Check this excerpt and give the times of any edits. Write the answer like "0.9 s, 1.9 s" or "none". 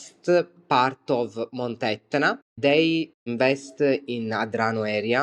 3.3 s

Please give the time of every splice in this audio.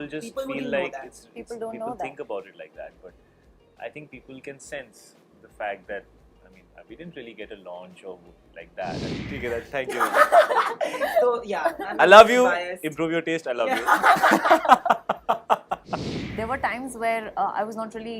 9.2 s, 16.2 s

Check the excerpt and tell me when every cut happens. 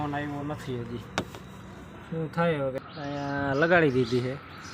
2.8 s

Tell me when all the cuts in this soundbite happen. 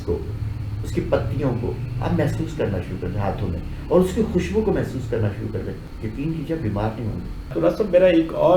5.9 s, 7.4 s

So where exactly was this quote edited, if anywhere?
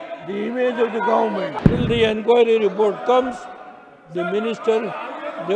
1.5 s

